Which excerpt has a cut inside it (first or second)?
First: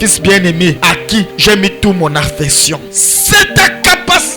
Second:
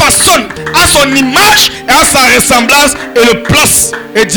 first